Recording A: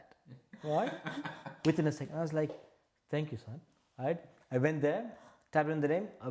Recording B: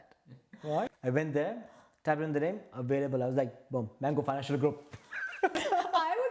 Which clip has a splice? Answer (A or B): B